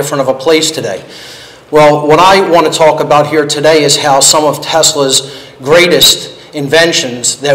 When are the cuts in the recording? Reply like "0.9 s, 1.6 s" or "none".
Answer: none

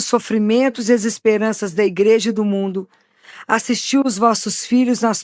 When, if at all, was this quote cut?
none

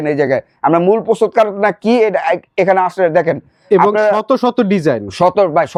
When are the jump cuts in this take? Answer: none

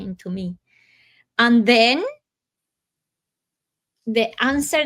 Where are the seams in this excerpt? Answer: none

